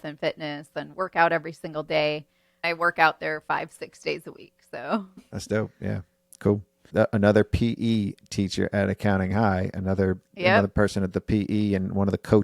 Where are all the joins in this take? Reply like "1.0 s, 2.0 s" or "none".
2.6 s, 5.2 s, 6.8 s

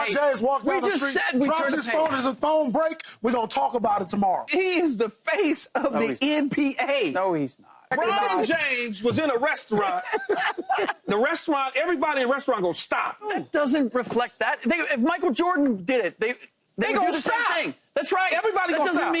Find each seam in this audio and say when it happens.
4.5 s, 7.9 s, 13.3 s

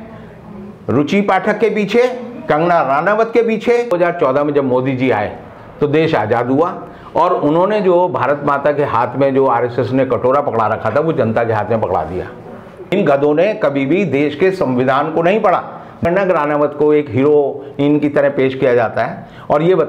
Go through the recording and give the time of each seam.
3.9 s, 12.9 s, 16.1 s

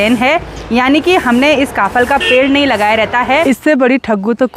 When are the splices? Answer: 3.4 s

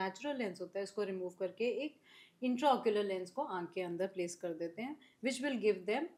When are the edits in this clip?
none

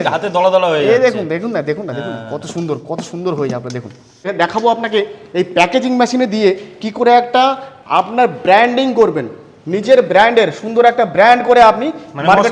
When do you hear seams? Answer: 4.3 s

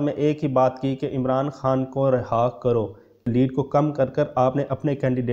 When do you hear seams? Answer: 3.3 s

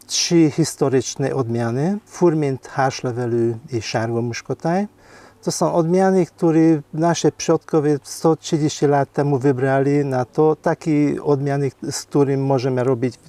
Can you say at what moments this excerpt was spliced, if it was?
none

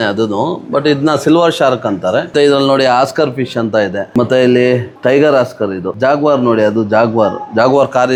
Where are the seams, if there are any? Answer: none

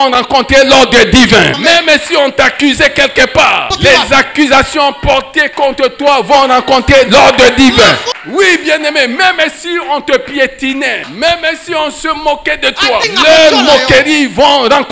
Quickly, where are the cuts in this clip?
1.6 s, 3.7 s, 8.1 s, 11.0 s, 13.0 s

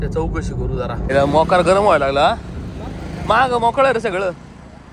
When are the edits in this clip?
1.0 s

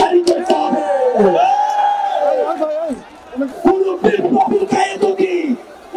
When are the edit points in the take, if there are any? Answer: 3.5 s

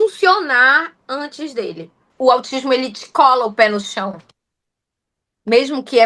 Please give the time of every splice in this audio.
2.0 s

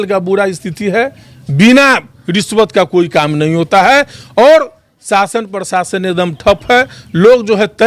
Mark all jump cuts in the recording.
none

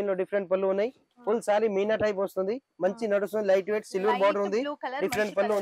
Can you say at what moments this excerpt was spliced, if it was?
1.1 s

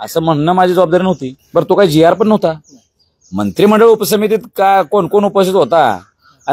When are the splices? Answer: 1.3 s

